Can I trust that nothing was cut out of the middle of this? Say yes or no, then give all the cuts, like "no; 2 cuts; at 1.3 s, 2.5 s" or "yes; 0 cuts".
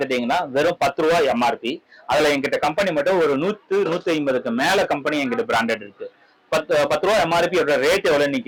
yes; 0 cuts